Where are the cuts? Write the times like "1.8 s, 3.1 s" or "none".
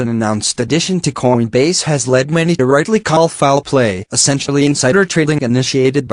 3.7 s